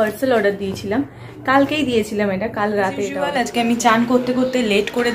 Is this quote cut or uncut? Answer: cut